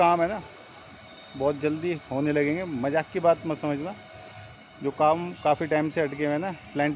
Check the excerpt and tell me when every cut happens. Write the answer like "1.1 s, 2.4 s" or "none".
none